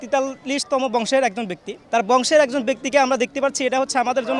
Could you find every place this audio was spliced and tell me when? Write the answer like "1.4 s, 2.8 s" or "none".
1.8 s